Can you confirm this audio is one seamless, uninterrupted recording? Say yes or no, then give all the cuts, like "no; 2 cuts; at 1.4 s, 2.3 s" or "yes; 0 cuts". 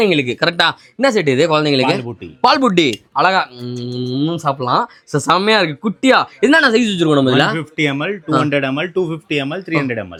yes; 0 cuts